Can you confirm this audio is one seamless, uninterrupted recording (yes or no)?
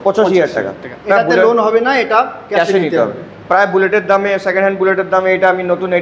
yes